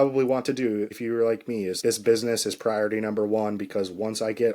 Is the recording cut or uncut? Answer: cut